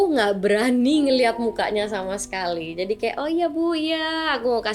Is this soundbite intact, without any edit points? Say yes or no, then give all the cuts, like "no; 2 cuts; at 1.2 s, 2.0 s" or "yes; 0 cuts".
yes; 0 cuts